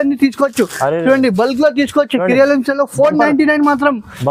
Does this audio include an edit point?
no; 0 cuts

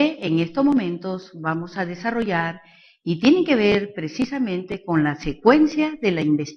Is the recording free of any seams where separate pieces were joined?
no; 1 cut; at 1.7 s

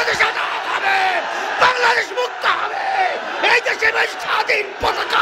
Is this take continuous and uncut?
yes; 0 cuts

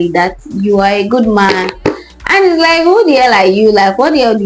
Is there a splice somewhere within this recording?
yes; 1 cut; at 1.8 s

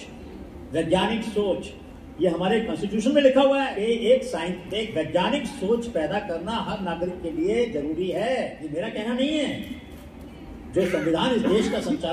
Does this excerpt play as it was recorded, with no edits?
no; 2 cuts; at 3.7 s, 8.6 s

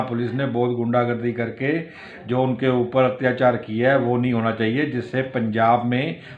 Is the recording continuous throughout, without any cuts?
yes; 0 cuts

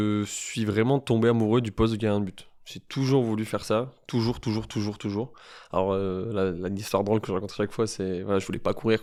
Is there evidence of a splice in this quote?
no; 0 cuts

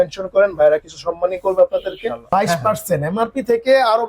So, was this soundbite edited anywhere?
yes; 1 cut; at 2.2 s

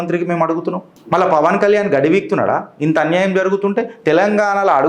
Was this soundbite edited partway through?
yes; 1 cut; at 0.9 s

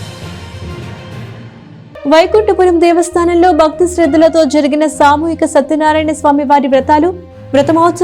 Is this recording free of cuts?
no; 1 cut; at 1.7 s

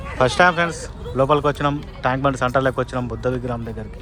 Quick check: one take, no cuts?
yes; 0 cuts

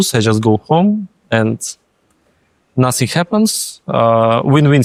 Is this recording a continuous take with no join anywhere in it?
yes; 0 cuts

